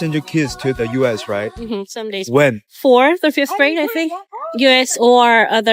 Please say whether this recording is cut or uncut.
uncut